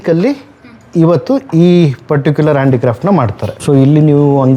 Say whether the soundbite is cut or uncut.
cut